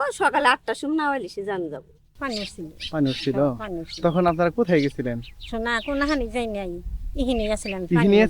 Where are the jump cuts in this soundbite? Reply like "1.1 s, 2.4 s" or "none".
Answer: 2.1 s